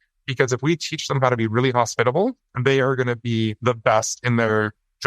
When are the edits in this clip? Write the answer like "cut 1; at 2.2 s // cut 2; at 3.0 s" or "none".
cut 1; at 2.5 s // cut 2; at 3.6 s